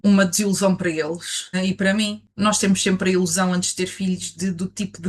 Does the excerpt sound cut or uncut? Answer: uncut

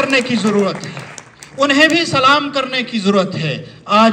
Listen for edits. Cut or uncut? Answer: uncut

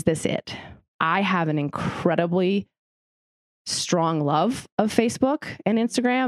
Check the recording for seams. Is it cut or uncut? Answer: cut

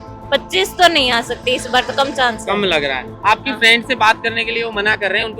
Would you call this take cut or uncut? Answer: uncut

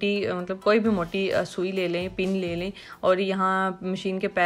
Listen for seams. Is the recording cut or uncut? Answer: uncut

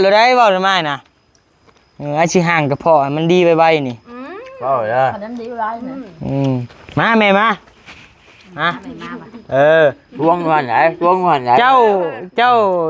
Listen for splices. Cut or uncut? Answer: uncut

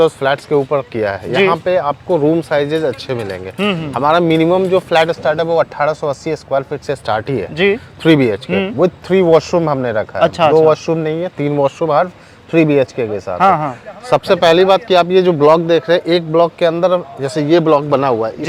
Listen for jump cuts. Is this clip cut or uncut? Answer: uncut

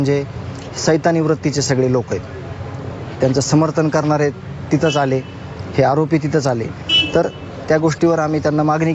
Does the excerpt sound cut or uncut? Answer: uncut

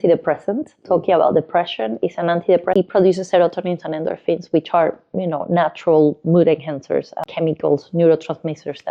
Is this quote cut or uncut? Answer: cut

